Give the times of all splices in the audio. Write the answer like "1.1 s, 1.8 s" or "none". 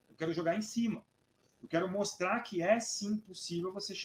none